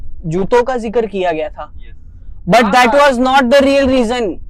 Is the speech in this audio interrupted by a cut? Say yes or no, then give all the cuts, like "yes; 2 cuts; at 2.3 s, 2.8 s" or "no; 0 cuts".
no; 0 cuts